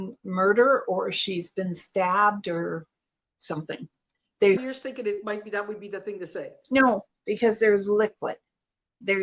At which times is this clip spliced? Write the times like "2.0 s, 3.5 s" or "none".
4.6 s